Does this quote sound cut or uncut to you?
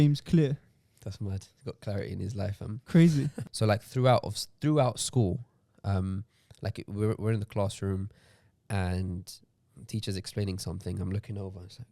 cut